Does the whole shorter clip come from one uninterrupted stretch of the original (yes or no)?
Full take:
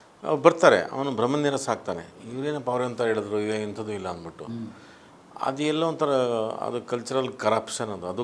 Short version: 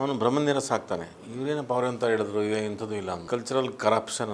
no